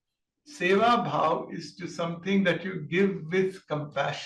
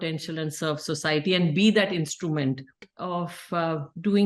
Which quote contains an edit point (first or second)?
second